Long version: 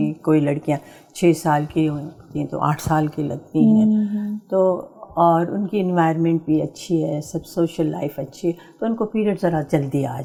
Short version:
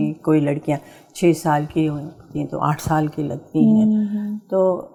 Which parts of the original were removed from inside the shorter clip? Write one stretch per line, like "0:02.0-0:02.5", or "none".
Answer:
none